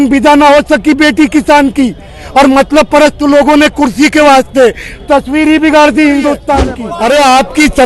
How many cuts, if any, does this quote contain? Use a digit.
1